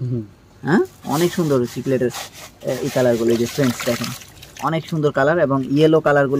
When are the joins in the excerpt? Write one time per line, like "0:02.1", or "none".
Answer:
none

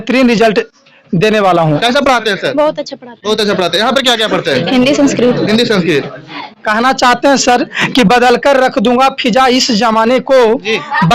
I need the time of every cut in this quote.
0:01.8
0:06.4

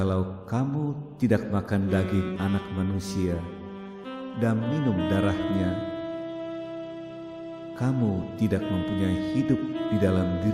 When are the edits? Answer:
none

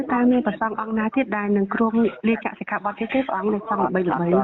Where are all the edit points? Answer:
none

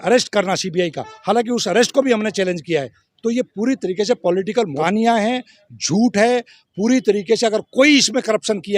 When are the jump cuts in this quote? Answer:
0:04.8

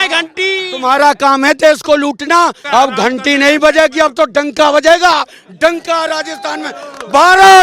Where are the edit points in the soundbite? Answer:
0:02.6

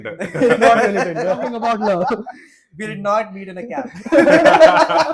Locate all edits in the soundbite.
0:01.5

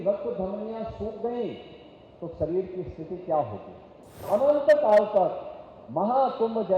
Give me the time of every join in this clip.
0:04.2

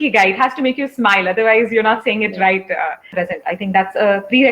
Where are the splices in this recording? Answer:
0:03.1

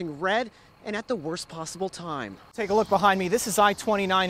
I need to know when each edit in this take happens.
0:02.6

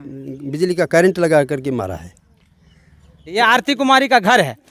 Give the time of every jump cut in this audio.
0:03.3

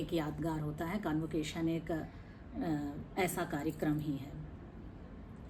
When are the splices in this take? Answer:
none

